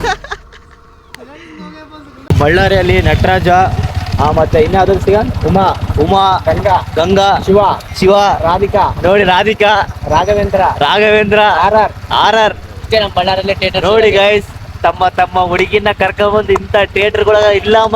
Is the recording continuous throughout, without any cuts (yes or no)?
no